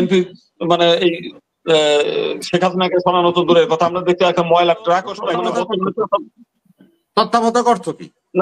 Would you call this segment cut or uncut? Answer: cut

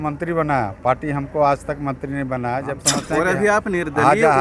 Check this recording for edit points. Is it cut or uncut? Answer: cut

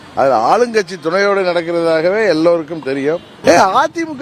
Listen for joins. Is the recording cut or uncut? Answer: cut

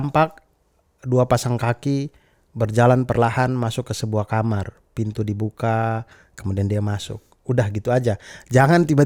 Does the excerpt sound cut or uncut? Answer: uncut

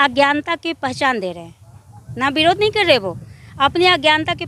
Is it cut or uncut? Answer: uncut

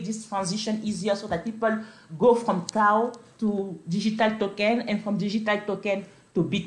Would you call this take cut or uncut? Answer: uncut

